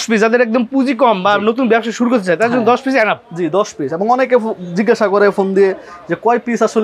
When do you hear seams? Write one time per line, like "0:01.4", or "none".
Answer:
none